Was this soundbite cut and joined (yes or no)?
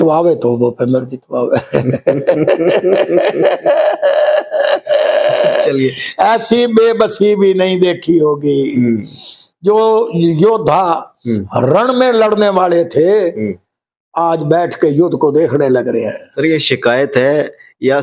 no